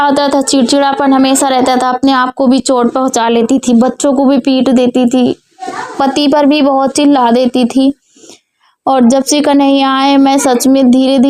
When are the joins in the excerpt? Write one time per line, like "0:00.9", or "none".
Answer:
none